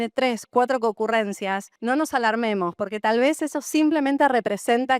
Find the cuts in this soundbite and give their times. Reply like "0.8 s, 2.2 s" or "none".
1.7 s